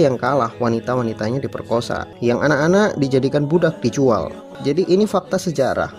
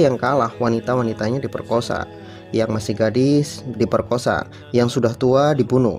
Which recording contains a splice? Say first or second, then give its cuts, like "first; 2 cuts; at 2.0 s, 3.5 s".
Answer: first; 2 cuts; at 2.1 s, 4.5 s